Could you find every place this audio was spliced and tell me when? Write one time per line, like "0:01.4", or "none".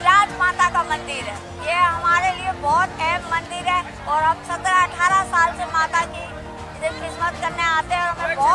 none

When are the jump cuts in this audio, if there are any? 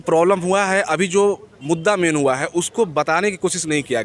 none

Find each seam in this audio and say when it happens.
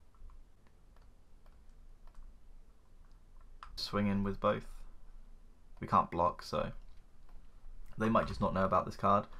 0:01.0
0:03.8

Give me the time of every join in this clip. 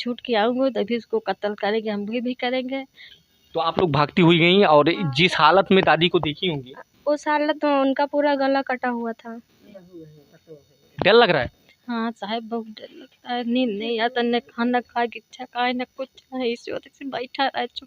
0:03.0
0:09.6

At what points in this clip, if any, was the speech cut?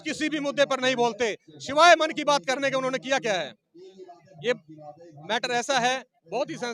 none

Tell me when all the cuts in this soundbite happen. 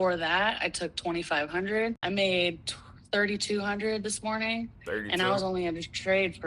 0:02.0

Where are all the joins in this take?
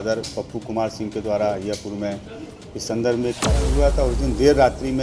0:03.6

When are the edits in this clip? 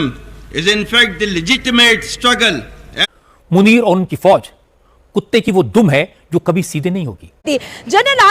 0:03.1
0:07.3

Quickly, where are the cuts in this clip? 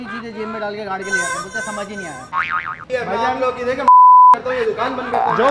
0:02.7

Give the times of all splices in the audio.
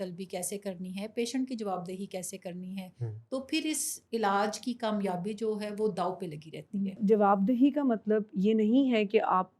0:07.0

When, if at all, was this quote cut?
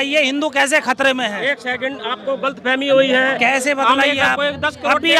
none

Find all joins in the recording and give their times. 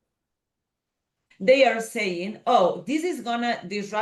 0:01.2

